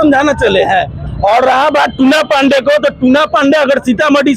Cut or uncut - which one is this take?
cut